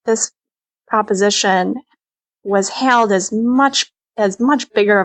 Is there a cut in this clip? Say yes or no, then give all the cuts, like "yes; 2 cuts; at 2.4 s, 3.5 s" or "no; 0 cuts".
no; 0 cuts